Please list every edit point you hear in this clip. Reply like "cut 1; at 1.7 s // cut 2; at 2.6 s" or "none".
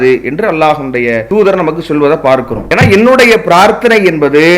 cut 1; at 1.2 s // cut 2; at 2.6 s